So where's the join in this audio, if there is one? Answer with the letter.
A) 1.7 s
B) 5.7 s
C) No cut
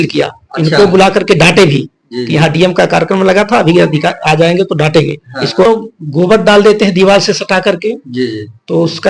B